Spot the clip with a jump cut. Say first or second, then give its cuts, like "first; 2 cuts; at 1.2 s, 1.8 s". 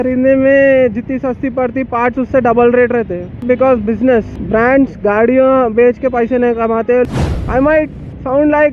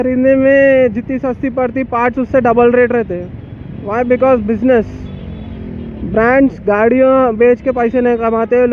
first; 3 cuts; at 3.4 s, 4.4 s, 7.1 s